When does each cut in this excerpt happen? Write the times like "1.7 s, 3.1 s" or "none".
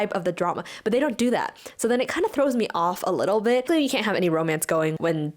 3.7 s